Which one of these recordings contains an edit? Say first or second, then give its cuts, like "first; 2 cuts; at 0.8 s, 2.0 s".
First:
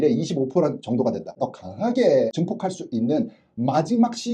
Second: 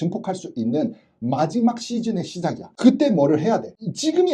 first; 1 cut; at 1.3 s